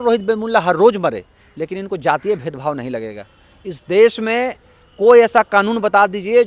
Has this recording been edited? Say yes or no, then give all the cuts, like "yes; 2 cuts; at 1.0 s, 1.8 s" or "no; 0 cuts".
no; 0 cuts